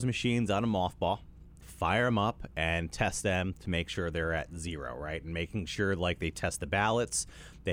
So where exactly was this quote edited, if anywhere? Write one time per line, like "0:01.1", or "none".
none